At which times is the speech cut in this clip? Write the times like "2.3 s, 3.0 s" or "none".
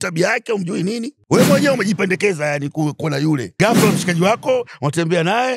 1.1 s, 3.5 s